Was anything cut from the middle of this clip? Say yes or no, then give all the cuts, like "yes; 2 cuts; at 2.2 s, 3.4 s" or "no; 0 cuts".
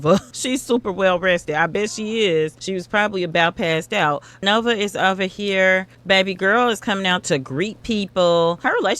no; 0 cuts